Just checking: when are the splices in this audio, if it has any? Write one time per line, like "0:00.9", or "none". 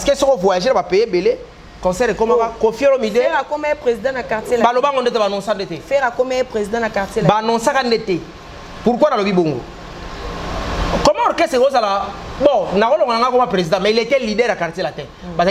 none